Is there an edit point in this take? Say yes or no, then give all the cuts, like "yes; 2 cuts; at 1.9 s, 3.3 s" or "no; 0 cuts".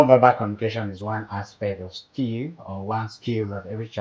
no; 0 cuts